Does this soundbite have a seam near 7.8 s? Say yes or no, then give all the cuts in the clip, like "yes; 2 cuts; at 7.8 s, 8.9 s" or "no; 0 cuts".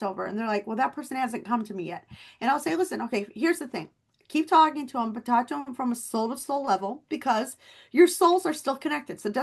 no; 0 cuts